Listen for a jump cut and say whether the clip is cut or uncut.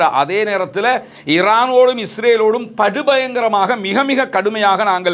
uncut